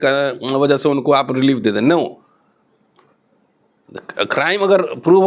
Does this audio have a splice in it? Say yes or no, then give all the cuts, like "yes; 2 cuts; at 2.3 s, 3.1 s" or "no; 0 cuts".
no; 0 cuts